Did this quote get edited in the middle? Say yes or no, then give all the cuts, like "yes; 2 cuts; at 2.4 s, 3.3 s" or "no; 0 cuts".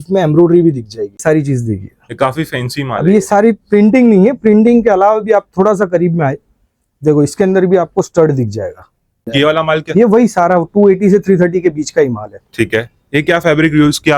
yes; 2 cuts; at 1.2 s, 9.3 s